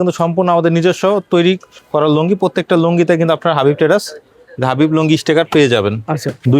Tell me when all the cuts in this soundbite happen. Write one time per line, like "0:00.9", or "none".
none